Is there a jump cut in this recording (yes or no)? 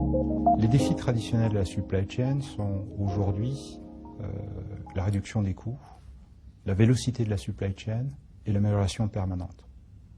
no